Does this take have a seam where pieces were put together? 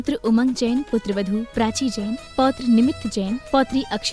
no; 0 cuts

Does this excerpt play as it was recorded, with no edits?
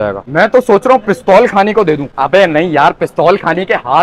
yes; 0 cuts

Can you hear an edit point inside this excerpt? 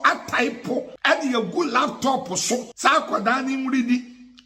yes; 2 cuts; at 0.9 s, 2.7 s

